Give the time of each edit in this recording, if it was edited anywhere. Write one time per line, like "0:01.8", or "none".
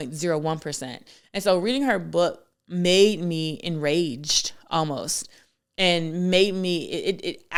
none